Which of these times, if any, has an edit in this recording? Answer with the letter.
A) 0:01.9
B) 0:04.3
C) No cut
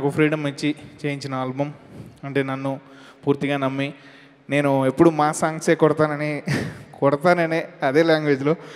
C